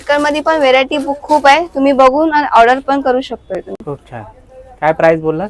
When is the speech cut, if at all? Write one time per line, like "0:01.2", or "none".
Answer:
none